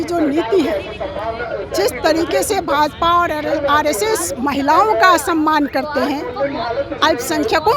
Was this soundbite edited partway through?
no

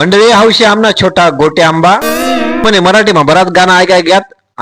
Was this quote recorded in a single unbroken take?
no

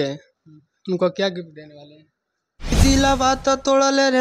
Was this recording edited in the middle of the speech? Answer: yes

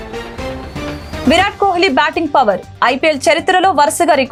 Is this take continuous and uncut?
yes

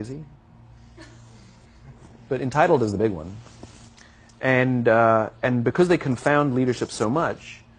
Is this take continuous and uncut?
yes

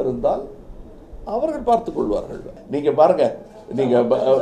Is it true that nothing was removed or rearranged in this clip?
no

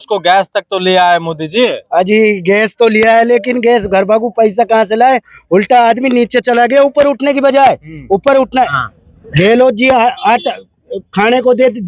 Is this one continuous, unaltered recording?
no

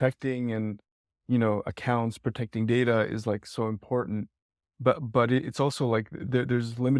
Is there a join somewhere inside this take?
no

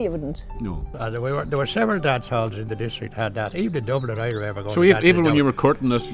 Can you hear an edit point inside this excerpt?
yes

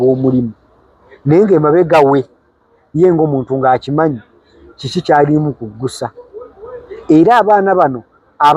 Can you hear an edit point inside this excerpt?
no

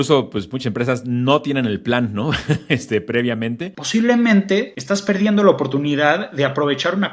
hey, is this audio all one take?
no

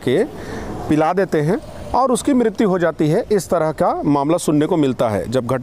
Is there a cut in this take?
no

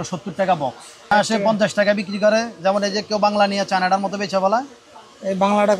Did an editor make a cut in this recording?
yes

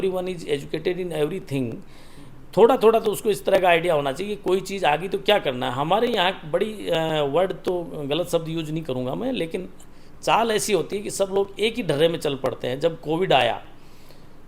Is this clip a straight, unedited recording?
yes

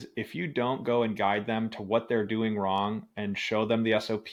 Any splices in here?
no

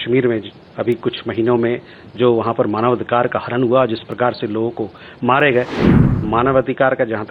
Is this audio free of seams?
no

